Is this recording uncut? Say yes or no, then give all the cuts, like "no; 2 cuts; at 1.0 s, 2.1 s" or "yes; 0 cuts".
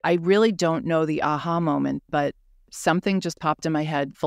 yes; 0 cuts